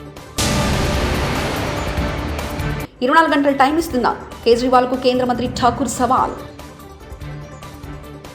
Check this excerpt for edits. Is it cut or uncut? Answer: uncut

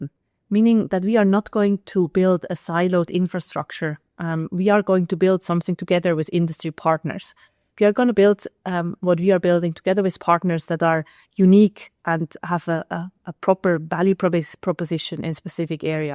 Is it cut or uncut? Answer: uncut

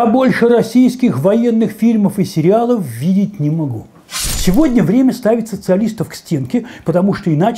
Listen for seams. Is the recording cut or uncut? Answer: cut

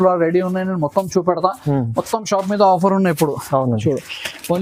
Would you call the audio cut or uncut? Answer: uncut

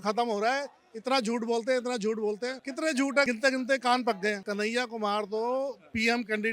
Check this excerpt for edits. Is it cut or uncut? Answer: cut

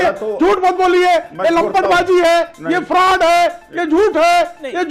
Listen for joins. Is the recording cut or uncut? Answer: uncut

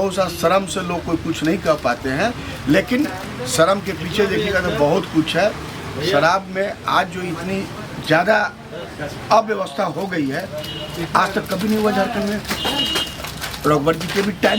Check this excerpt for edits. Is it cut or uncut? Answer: uncut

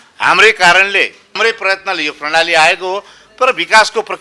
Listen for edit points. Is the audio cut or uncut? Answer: cut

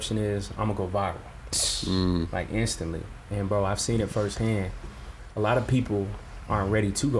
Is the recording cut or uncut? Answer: uncut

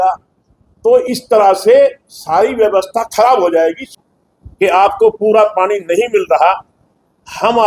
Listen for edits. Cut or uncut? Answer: cut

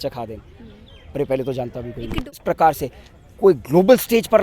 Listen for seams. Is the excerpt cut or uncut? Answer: cut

